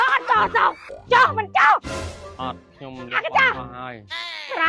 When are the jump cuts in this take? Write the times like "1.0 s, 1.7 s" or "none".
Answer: 0.9 s